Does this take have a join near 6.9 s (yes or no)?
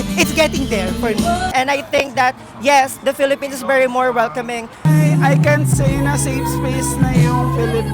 no